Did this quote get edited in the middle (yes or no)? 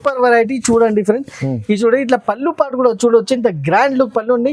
no